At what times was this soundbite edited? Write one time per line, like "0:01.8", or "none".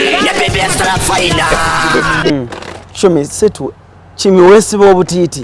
none